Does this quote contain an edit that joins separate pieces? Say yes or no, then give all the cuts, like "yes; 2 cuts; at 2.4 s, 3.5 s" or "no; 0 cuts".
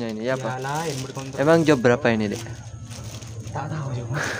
yes; 1 cut; at 1.4 s